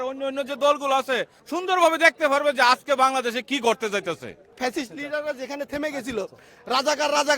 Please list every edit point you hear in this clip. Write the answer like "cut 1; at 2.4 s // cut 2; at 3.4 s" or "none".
cut 1; at 1.4 s // cut 2; at 4.6 s

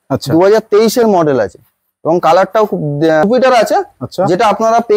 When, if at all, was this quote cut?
cut 1; at 3.2 s

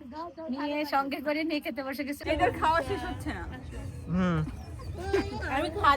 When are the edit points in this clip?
cut 1; at 2.2 s

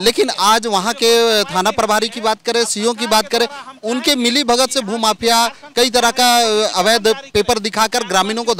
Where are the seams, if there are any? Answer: none

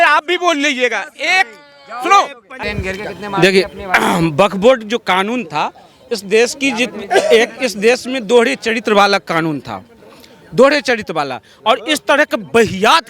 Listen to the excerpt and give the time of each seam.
cut 1; at 2.6 s

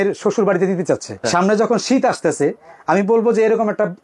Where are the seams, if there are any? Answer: cut 1; at 1.2 s

